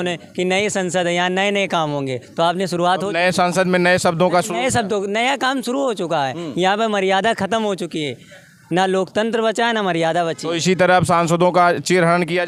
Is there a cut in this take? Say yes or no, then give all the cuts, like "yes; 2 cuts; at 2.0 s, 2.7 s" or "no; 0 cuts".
no; 0 cuts